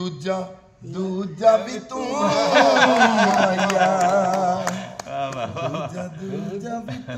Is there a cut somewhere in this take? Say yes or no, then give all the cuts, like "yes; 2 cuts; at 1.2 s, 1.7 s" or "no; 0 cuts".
no; 0 cuts